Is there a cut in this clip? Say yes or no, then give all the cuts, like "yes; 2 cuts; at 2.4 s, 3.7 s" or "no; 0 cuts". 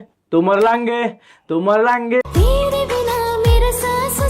yes; 2 cuts; at 1.2 s, 2.2 s